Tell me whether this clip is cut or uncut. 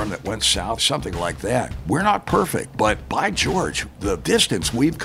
cut